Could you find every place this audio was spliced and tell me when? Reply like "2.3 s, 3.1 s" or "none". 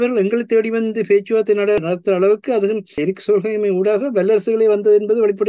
1.8 s, 3.0 s